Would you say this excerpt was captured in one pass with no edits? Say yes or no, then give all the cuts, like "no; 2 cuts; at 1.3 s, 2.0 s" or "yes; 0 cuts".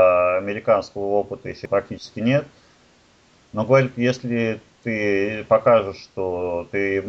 yes; 0 cuts